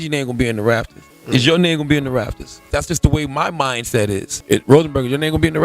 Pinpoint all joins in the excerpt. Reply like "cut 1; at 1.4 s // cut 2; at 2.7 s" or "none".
cut 1; at 2.6 s // cut 2; at 4.4 s